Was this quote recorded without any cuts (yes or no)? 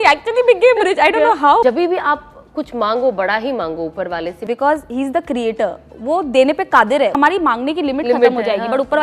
no